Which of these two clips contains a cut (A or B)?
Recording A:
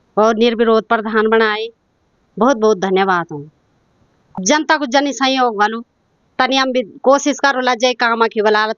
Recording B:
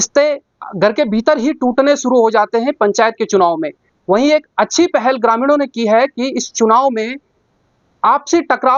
A